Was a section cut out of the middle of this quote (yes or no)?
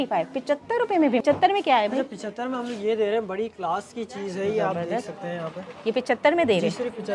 yes